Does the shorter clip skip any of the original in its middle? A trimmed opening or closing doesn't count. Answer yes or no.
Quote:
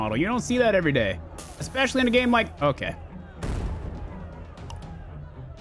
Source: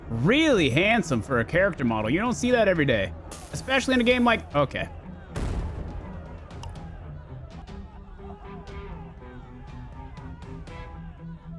no